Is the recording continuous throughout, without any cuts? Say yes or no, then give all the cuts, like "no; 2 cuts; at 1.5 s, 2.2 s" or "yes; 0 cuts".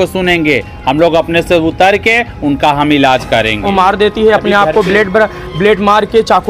no; 1 cut; at 3.6 s